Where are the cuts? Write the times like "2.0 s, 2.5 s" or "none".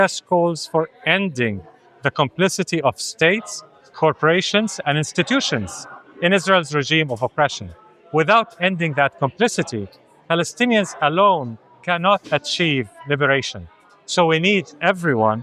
none

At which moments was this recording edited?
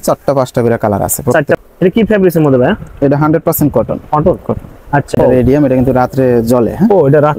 1.6 s, 5.1 s

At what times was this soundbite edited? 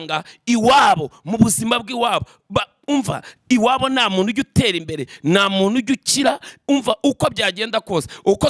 none

